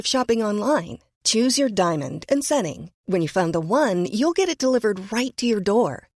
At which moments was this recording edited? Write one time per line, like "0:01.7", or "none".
none